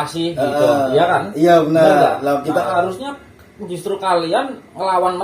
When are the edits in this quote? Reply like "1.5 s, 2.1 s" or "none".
2.7 s